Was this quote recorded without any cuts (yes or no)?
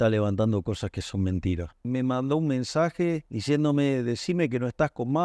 no